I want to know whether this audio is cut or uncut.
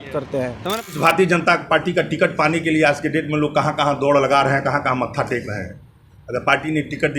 cut